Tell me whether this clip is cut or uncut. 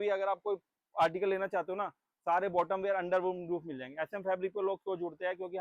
uncut